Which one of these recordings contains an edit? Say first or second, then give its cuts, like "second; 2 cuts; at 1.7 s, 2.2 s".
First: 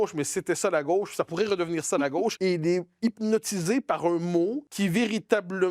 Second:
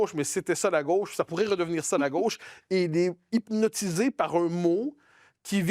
first; 2 cuts; at 2.4 s, 4.7 s